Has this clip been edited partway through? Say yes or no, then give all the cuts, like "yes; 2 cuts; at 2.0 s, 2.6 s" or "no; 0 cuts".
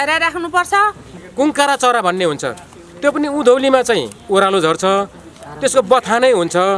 yes; 1 cut; at 1.2 s